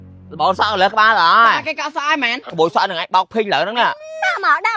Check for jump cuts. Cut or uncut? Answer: cut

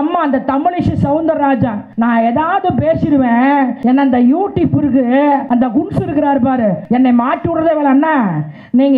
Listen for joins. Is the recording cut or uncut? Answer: cut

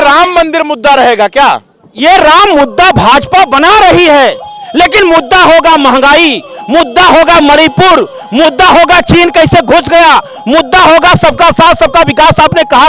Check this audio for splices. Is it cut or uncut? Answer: uncut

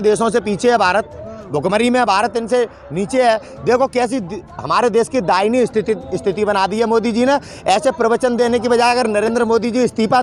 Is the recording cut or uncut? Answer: uncut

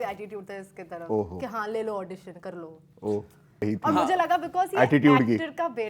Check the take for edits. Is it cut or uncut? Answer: cut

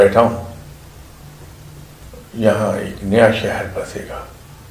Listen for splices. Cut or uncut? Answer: uncut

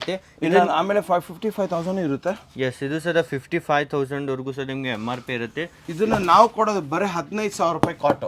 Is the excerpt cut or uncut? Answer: uncut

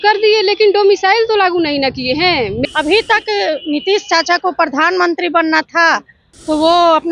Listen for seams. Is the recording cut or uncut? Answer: cut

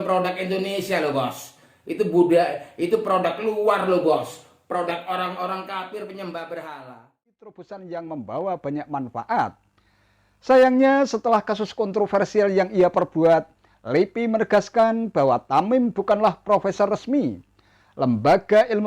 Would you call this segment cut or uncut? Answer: cut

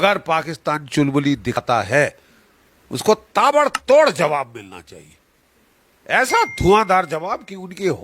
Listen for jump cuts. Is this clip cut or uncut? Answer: cut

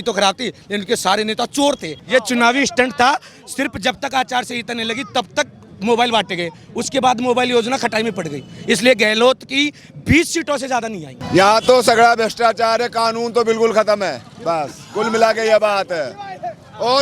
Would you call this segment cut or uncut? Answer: cut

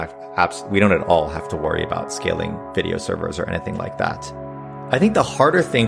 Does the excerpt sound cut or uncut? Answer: cut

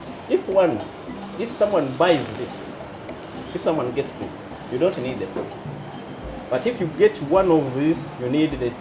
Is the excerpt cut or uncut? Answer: uncut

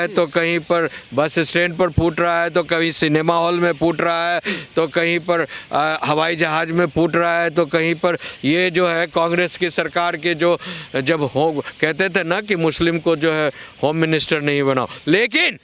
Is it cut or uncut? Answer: uncut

